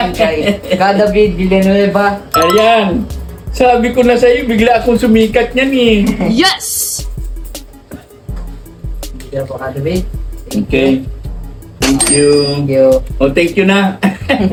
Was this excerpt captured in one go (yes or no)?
yes